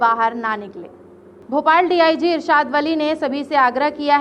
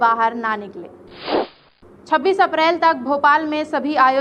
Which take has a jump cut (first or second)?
second